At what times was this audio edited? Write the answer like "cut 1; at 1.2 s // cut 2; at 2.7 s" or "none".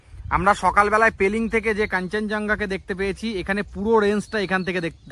none

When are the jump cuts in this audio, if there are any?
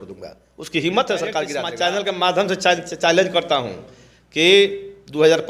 cut 1; at 1.6 s

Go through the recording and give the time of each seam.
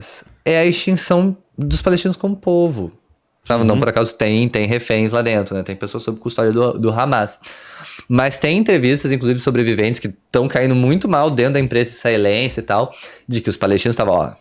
cut 1; at 3.5 s

